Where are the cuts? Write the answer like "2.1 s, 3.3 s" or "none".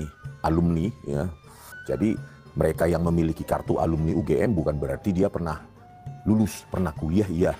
1.8 s

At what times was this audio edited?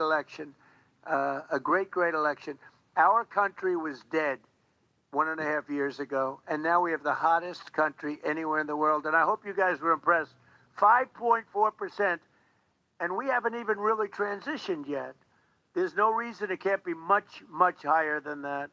none

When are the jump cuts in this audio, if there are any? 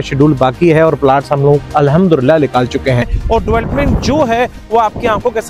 3.1 s

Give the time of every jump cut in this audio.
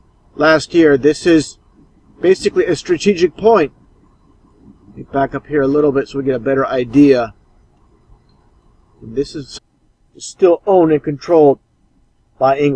none

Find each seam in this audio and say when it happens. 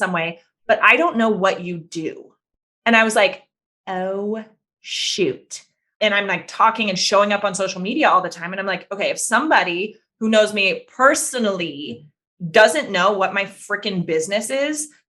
5.9 s

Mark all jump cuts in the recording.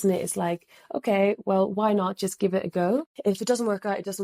3.1 s

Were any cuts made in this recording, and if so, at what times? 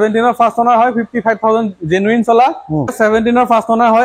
2.9 s

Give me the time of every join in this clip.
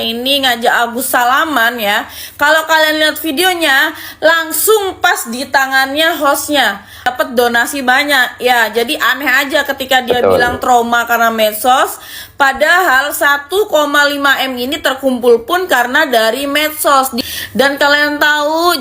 7.1 s, 17.1 s

